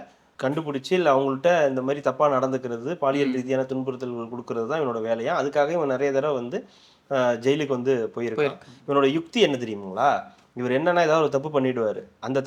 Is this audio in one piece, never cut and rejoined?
yes; 0 cuts

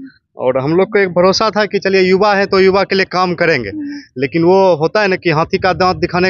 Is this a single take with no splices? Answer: yes; 0 cuts

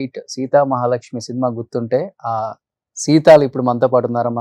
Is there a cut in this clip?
no; 0 cuts

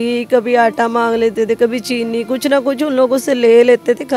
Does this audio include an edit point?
no; 0 cuts

